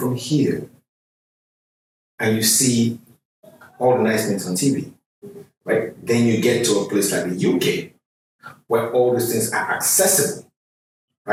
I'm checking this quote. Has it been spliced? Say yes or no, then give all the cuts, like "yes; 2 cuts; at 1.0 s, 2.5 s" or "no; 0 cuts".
no; 0 cuts